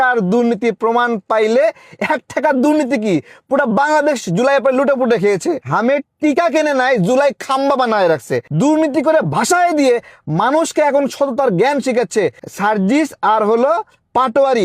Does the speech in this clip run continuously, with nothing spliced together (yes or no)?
no